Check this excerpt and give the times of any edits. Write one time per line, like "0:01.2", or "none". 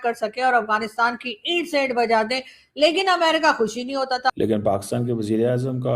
0:04.3